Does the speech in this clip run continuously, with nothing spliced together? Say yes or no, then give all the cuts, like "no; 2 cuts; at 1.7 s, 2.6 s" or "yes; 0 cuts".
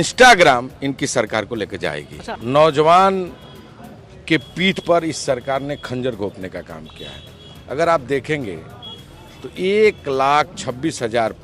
no; 1 cut; at 2.2 s